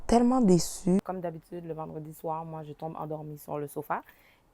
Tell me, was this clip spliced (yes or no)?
yes